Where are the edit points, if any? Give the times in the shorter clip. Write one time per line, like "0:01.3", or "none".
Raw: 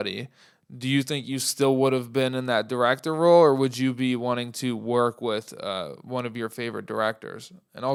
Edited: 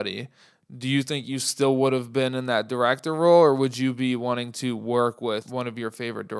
0:05.5